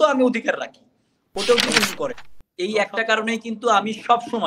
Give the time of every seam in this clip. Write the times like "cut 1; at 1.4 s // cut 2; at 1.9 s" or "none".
cut 1; at 2.3 s